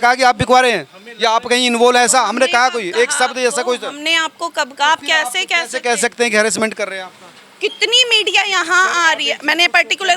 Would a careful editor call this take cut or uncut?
uncut